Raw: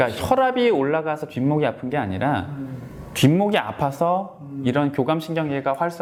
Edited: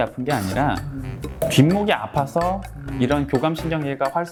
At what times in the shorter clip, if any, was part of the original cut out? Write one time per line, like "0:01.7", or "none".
none